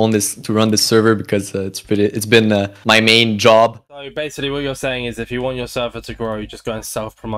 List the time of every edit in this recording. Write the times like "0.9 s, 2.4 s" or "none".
3.9 s